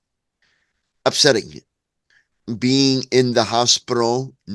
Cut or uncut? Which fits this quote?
cut